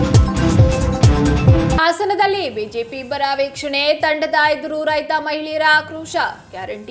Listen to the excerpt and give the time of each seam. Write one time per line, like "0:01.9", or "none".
0:01.8